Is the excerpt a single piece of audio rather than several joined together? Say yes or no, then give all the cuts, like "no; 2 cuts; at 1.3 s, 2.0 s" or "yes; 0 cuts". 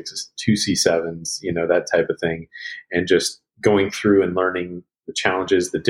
yes; 0 cuts